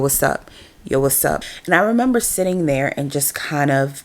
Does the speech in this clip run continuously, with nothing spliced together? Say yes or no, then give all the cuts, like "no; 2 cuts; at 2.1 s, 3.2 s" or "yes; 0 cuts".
no; 1 cut; at 1.4 s